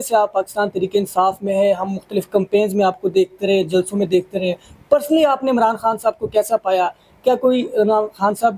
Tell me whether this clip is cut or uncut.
uncut